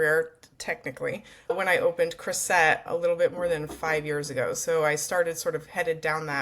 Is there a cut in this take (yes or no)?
yes